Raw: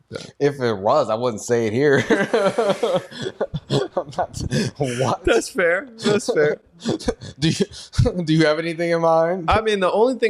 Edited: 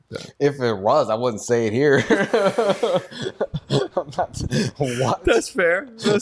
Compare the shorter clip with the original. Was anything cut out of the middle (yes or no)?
no